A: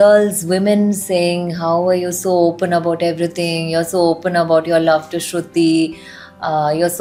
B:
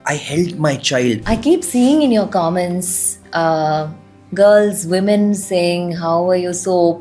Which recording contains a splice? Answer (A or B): B